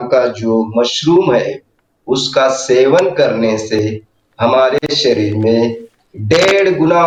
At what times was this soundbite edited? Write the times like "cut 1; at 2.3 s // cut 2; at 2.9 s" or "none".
none